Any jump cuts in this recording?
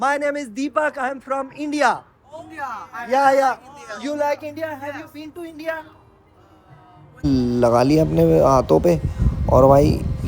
yes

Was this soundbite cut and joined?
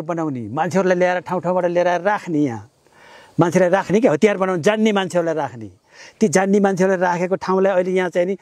no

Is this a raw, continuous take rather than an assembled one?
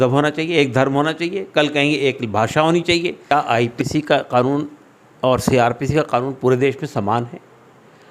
no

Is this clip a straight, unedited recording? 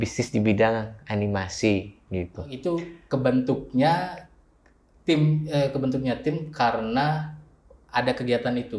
no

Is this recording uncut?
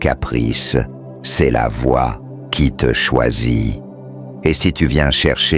yes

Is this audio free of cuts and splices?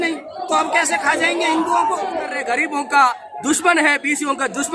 no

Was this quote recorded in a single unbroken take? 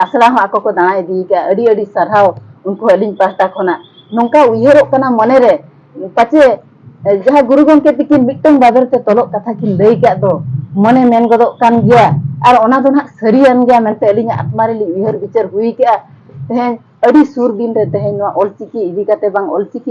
yes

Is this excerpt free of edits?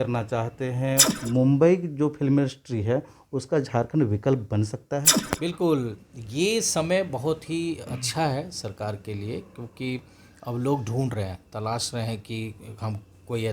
no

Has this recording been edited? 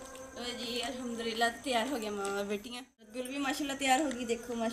yes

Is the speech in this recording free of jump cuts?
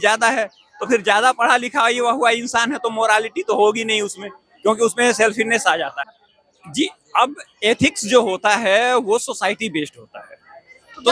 yes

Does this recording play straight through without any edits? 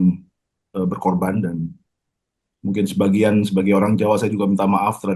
yes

